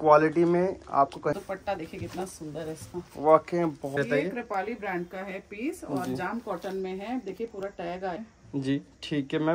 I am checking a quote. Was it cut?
yes; 3 cuts; at 1.4 s, 3.9 s, 8.2 s

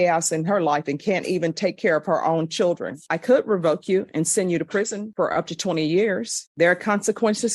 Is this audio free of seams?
no; 2 cuts; at 3.1 s, 6.4 s

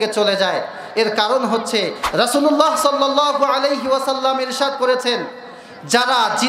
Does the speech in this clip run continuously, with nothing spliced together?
no; 1 cut; at 2.0 s

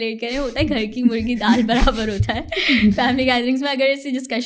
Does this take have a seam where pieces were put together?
no; 0 cuts

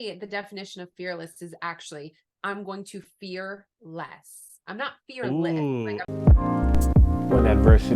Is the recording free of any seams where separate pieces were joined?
no; 1 cut; at 6.1 s

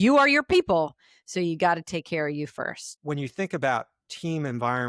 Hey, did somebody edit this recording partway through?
yes; 1 cut; at 2.9 s

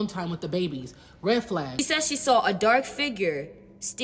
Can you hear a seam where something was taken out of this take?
yes; 1 cut; at 1.7 s

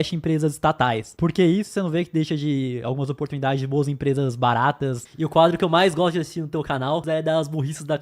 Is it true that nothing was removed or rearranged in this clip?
no; 3 cuts; at 1.1 s, 5.0 s, 7.0 s

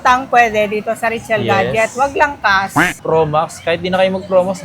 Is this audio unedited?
no; 1 cut; at 3.0 s

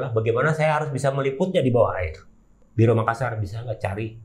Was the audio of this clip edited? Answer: yes; 1 cut; at 2.6 s

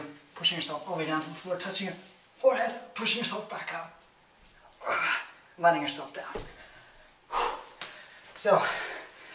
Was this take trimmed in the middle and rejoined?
no; 0 cuts

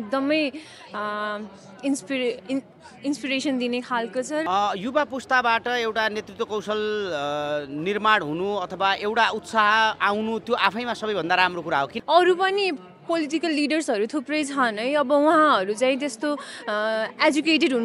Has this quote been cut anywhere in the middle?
yes; 2 cuts; at 4.4 s, 12.0 s

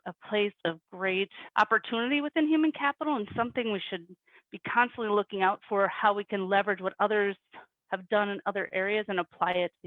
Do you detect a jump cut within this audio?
no; 0 cuts

